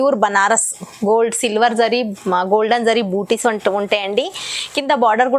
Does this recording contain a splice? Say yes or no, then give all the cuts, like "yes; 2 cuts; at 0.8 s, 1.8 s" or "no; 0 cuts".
no; 0 cuts